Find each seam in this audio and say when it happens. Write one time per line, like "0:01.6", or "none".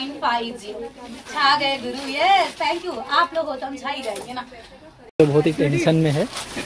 0:05.1